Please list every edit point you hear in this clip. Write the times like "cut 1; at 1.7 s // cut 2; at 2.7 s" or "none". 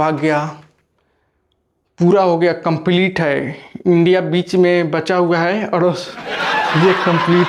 none